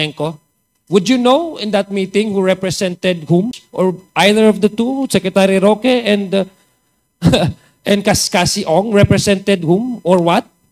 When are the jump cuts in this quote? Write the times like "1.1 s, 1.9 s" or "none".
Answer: 3.6 s